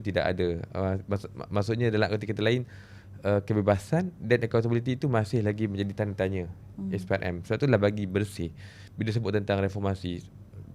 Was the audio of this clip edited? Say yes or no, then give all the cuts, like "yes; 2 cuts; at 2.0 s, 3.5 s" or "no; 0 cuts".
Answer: no; 0 cuts